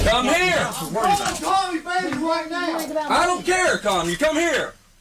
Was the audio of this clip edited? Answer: no; 0 cuts

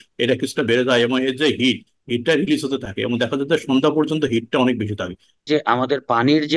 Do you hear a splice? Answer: yes; 1 cut; at 5.4 s

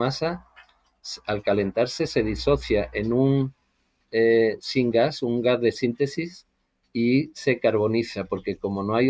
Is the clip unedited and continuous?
yes; 0 cuts

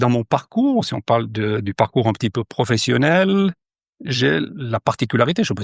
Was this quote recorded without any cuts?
yes; 0 cuts

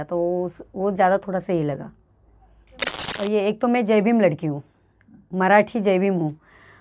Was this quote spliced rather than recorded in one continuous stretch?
yes; 1 cut; at 3.0 s

